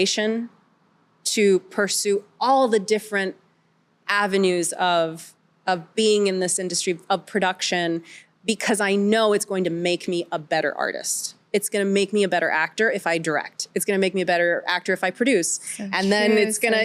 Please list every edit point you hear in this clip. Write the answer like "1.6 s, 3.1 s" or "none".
none